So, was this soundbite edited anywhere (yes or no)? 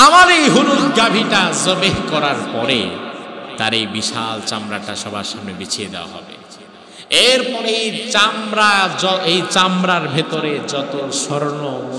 no